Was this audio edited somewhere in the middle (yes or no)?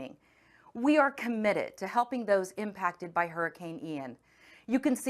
no